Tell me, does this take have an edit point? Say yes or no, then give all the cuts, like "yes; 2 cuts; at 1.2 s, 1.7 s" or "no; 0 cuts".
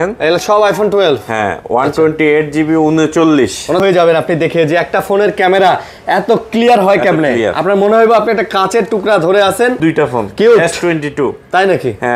yes; 2 cuts; at 3.8 s, 9.8 s